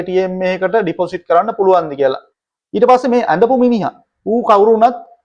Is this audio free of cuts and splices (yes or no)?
no